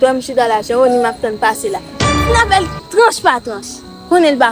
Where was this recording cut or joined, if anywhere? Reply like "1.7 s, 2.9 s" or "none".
2.1 s